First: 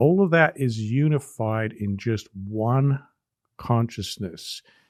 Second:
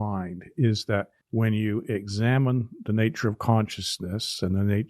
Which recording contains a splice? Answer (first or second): second